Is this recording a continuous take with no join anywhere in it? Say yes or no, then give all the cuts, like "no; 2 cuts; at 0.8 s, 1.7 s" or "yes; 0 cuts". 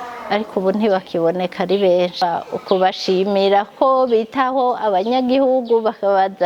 no; 1 cut; at 2.2 s